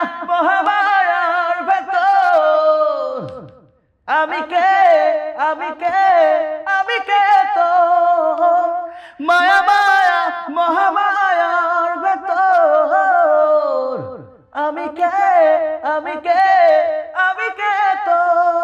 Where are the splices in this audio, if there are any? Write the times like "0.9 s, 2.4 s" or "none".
none